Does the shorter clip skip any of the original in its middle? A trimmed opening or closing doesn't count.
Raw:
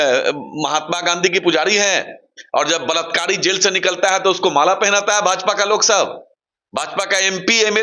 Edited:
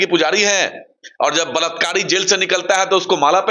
no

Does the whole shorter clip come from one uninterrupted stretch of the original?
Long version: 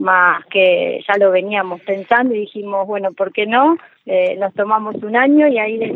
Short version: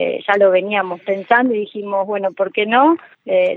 yes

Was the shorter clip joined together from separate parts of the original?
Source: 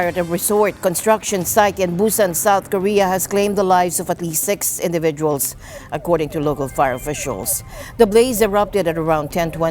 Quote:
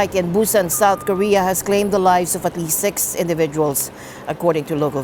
no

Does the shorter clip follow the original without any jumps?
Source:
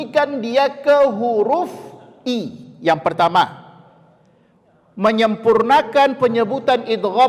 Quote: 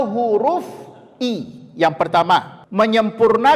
no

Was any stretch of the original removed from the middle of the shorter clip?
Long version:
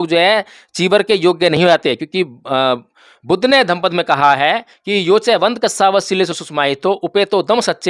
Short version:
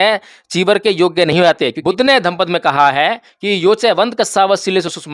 yes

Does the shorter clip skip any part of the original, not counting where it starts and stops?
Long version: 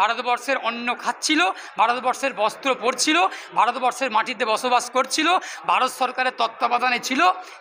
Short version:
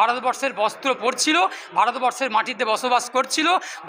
no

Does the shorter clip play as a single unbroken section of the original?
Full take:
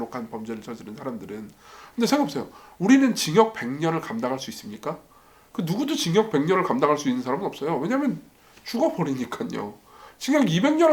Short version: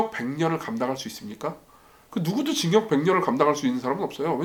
yes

